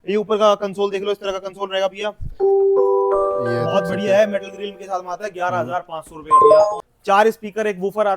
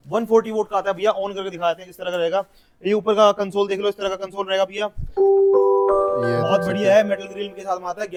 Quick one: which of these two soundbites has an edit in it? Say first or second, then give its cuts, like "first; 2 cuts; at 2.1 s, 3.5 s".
first; 1 cut; at 6.8 s